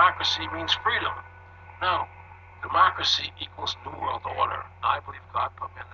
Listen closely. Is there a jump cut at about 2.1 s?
no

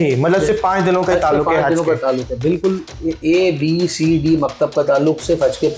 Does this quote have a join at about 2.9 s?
no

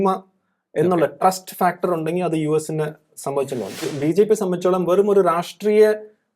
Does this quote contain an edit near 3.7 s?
yes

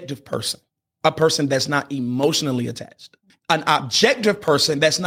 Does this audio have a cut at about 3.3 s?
yes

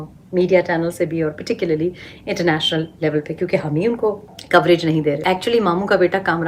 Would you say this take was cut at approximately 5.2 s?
yes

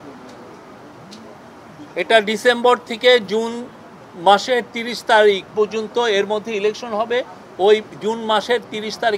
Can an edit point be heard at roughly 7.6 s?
no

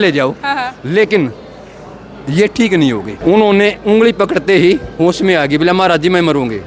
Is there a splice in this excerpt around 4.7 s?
no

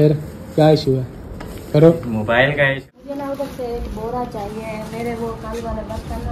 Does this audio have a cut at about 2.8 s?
yes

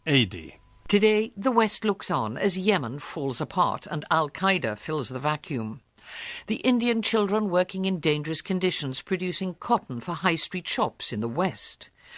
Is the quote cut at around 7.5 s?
no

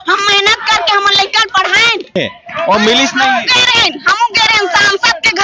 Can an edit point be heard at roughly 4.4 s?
no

